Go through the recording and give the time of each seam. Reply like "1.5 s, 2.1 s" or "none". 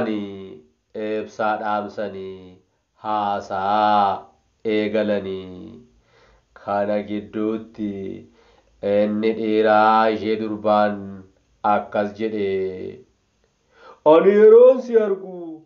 none

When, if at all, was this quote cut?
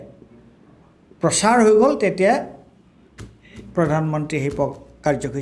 none

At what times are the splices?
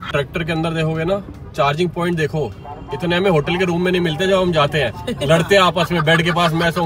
none

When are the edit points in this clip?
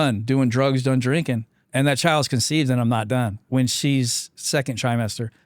1.5 s, 3.4 s

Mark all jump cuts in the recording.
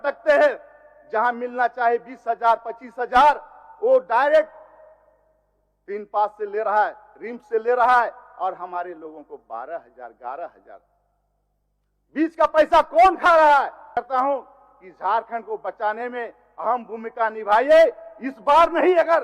14.0 s

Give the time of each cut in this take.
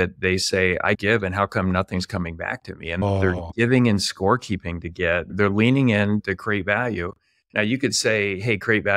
3.0 s, 5.3 s, 6.2 s

